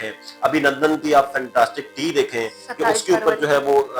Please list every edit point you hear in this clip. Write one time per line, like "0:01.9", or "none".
none